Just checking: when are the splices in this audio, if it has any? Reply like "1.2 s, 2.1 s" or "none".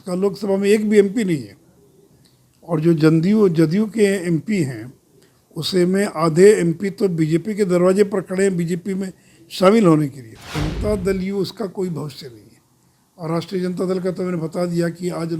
10.6 s